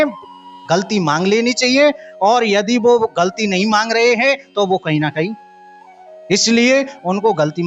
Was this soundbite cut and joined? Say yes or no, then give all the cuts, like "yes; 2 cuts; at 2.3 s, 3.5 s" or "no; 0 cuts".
no; 0 cuts